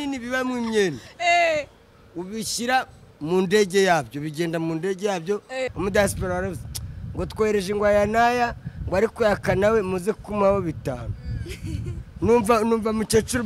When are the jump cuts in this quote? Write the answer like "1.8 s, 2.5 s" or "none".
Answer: 5.7 s